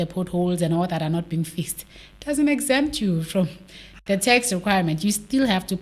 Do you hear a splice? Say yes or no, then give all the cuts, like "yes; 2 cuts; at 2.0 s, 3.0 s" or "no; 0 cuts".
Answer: no; 0 cuts